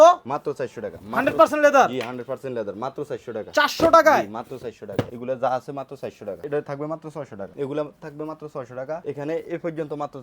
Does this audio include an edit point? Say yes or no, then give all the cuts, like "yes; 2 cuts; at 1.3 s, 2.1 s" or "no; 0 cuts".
yes; 4 cuts; at 5.2 s, 6.3 s, 7.5 s, 9.0 s